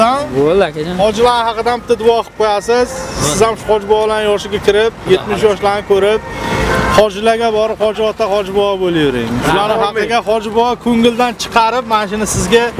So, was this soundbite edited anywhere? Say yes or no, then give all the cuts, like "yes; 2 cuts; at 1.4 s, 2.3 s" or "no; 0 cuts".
no; 0 cuts